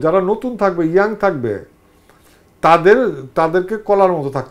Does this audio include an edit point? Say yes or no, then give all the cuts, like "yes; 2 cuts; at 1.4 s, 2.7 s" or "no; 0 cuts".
no; 0 cuts